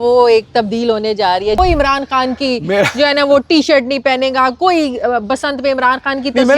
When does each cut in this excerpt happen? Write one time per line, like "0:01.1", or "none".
0:01.6